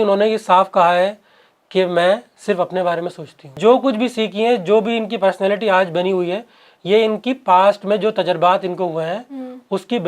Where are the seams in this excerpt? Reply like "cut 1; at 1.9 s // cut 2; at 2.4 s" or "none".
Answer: cut 1; at 3.6 s